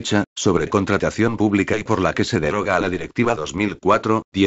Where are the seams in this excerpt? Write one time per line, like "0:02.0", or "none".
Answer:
none